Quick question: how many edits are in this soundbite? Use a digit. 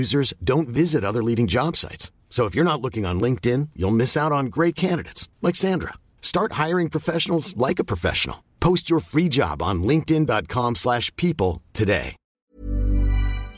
1